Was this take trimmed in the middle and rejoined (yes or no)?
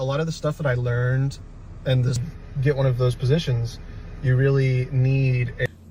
no